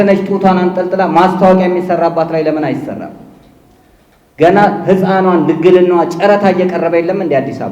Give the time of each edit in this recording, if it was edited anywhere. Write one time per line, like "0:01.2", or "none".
none